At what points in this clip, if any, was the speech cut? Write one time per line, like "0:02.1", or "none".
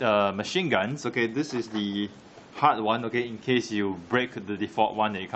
none